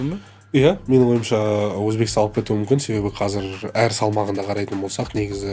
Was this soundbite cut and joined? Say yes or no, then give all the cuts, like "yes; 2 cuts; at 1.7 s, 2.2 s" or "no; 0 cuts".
no; 0 cuts